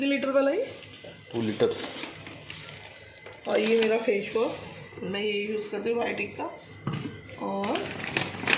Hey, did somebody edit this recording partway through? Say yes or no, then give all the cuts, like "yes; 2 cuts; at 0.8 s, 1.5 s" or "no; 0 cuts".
no; 0 cuts